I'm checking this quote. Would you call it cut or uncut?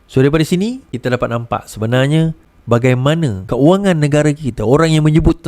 cut